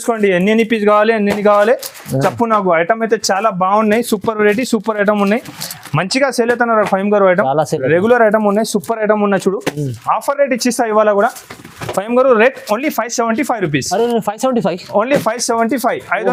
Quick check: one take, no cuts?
yes; 0 cuts

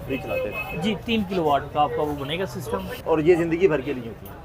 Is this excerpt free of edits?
no; 1 cut; at 3.0 s

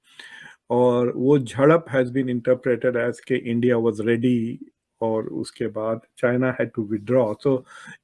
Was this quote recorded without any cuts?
yes; 0 cuts

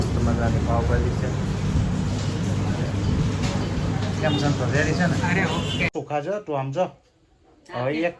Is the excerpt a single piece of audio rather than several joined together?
no; 1 cut; at 5.9 s

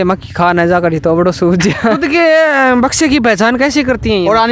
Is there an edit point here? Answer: yes; 1 cut; at 2.0 s

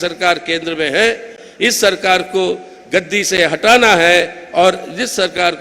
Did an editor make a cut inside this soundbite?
no; 0 cuts

